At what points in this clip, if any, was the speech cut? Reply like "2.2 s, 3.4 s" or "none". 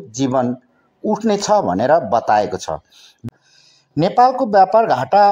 3.1 s